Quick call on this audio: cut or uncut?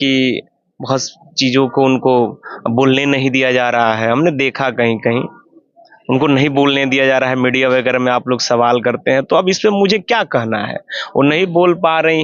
uncut